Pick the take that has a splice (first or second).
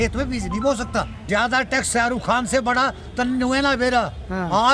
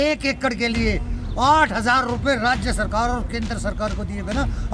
first